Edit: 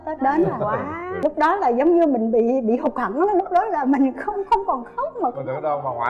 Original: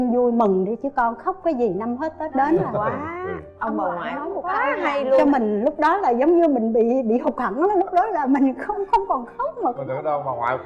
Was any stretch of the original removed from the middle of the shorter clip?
yes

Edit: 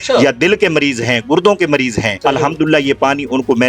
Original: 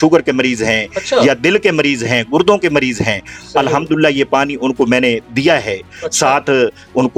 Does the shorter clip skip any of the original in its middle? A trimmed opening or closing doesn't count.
yes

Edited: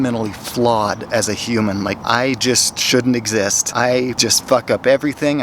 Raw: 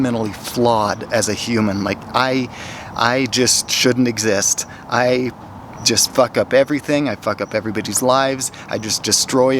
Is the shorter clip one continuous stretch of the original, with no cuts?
no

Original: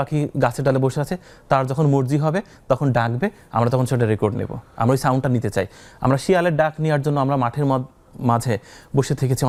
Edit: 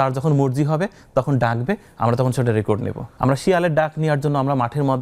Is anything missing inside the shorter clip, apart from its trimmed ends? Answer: yes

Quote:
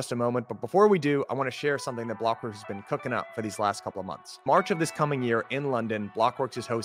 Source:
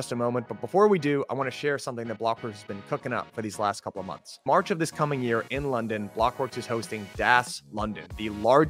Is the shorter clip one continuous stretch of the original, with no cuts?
yes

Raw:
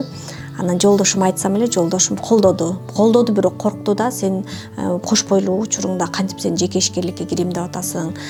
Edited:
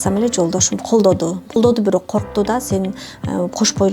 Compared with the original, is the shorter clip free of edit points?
no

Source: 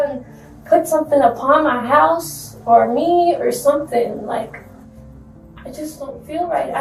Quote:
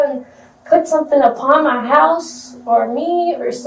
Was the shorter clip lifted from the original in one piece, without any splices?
yes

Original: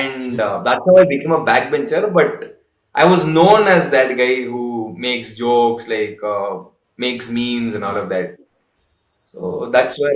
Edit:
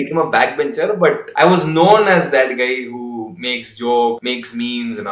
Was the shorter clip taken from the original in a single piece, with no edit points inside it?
no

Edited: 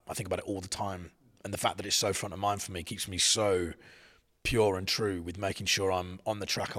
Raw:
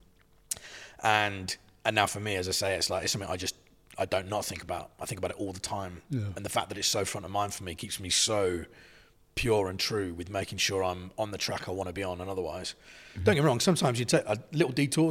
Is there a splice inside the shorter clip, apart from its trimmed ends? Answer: no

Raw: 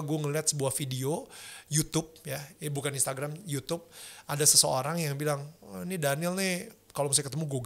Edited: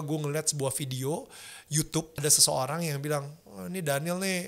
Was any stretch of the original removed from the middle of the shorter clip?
yes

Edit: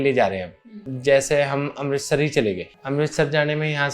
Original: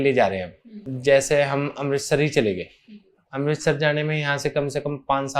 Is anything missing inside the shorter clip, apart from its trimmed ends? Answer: yes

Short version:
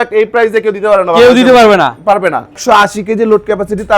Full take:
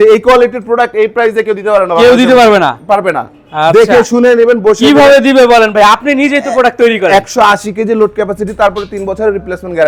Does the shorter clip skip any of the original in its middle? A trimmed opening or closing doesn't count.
yes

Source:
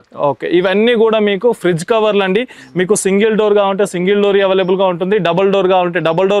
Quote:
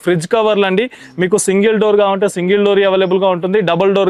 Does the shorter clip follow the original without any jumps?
yes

